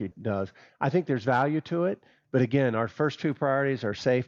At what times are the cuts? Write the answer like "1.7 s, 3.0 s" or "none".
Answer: none